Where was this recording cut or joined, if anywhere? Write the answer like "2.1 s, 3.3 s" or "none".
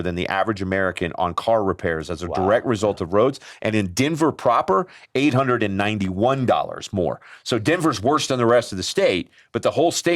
none